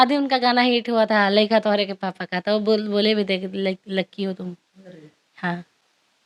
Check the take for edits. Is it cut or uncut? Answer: uncut